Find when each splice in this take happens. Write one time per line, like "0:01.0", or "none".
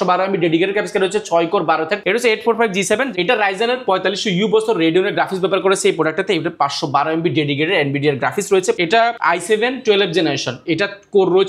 0:02.0
0:08.8

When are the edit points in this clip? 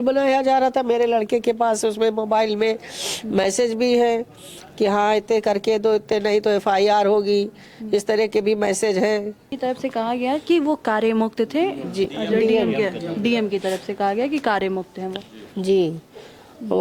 0:09.5

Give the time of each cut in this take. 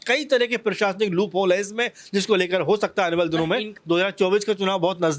0:03.7

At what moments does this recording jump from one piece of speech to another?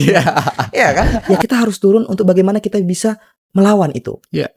0:01.2

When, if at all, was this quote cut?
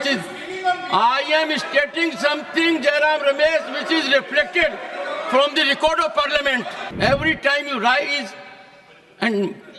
0:06.8

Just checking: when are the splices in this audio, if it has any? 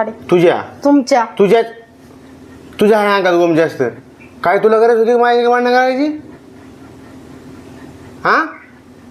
none

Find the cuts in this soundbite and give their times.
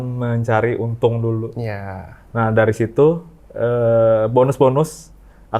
none

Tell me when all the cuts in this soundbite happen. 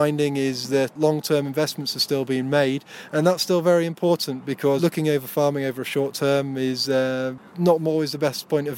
0:00.9
0:04.8
0:07.4

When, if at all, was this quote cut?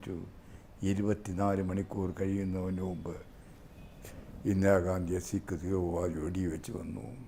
none

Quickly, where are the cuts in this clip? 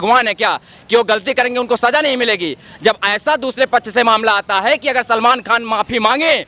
none

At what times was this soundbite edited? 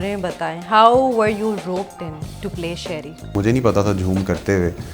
0:03.3

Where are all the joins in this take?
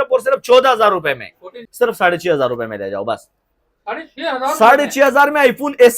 0:01.6

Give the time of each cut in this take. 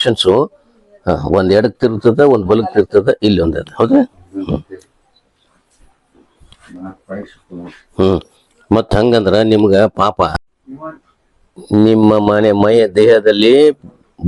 none

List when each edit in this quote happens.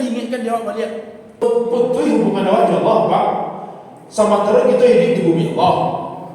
0:01.4

